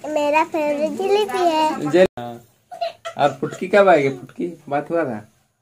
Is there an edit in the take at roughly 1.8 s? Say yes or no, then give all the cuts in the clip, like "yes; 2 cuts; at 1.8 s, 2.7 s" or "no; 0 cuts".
no; 0 cuts